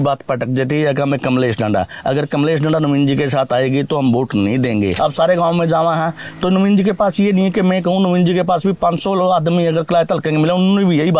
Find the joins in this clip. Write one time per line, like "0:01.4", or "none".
0:04.9